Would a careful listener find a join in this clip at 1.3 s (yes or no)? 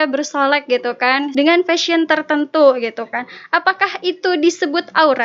yes